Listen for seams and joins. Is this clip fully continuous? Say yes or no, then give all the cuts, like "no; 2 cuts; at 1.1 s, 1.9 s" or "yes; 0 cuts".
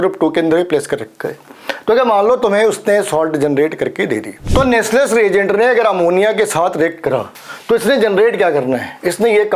no; 1 cut; at 4.4 s